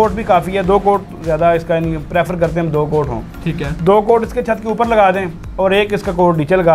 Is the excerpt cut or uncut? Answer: uncut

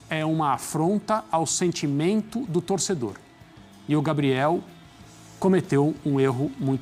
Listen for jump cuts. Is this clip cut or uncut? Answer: uncut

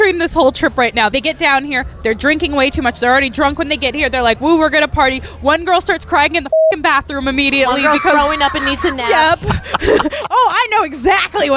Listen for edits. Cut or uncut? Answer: cut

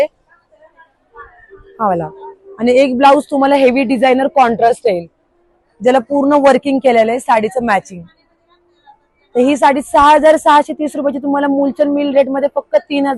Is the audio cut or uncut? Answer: uncut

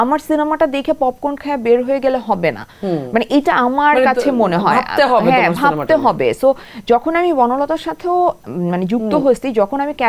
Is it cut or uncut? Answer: uncut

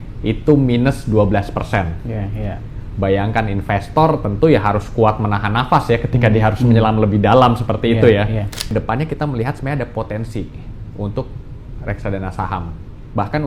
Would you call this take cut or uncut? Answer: cut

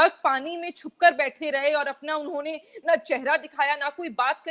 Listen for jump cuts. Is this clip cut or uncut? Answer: uncut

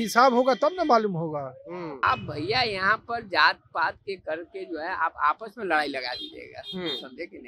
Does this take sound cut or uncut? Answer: cut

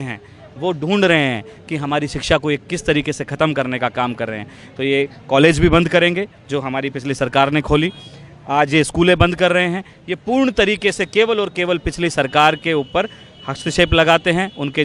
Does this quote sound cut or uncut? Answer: uncut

